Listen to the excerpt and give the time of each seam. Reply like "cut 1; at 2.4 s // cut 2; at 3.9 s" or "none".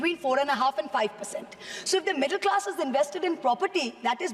none